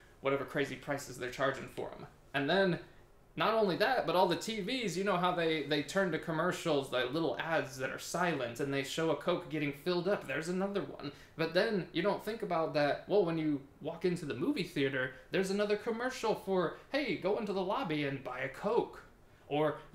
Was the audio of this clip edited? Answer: no; 0 cuts

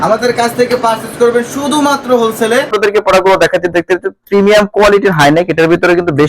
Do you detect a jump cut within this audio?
yes; 1 cut; at 2.7 s

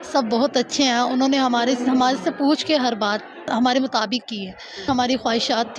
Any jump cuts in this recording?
yes; 2 cuts; at 3.5 s, 4.9 s

